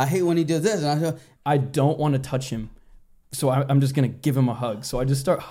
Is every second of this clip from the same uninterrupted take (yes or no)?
no